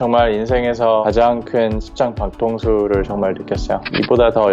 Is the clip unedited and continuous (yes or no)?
no